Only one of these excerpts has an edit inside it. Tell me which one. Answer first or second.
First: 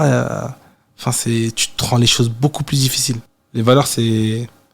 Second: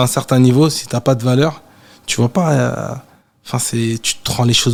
first